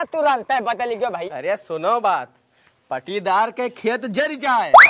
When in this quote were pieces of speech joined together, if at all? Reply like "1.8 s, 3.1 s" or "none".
1.2 s